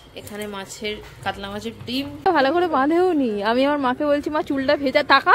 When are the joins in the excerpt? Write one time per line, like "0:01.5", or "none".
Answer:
0:02.2